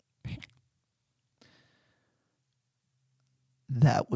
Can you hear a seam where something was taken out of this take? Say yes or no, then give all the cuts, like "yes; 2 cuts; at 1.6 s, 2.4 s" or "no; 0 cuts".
no; 0 cuts